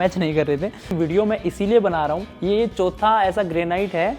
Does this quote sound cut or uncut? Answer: cut